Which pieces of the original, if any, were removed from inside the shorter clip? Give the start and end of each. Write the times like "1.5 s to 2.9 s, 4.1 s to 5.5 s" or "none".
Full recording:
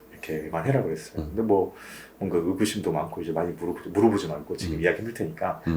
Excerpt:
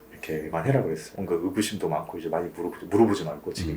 1.1 s to 2.1 s

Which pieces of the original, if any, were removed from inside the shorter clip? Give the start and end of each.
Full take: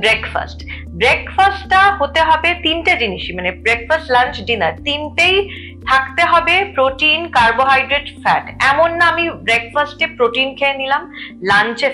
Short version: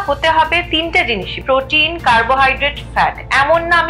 3.3 s to 6.7 s

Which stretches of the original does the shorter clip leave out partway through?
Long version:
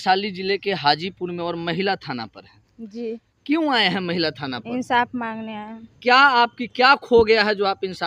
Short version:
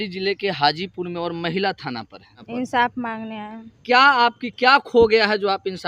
2.6 s to 4.5 s

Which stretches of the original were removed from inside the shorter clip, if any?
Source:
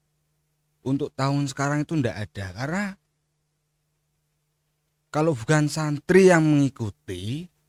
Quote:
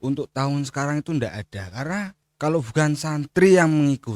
3.1 s to 5.0 s

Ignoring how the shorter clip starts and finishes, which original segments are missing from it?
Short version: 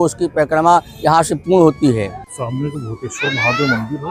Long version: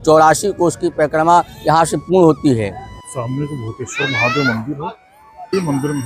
2.9 s to 3.0 s

